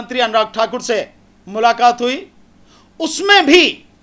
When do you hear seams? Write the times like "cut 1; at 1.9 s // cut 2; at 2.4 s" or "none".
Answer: none